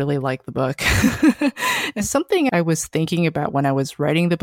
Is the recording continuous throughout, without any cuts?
no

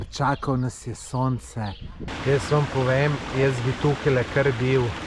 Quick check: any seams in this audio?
yes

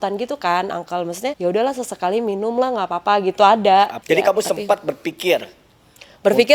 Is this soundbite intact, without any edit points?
no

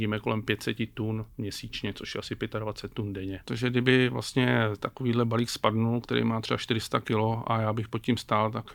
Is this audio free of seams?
no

